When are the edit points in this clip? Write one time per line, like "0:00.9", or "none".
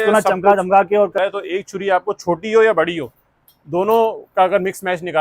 0:01.2